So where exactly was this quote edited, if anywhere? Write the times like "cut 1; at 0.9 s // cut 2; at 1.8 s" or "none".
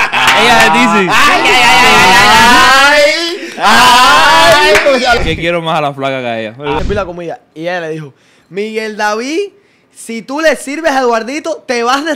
cut 1; at 5.2 s // cut 2; at 6.8 s